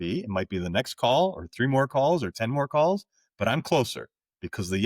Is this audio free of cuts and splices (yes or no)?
yes